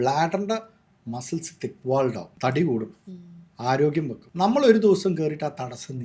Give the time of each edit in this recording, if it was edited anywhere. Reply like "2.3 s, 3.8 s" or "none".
2.3 s, 4.2 s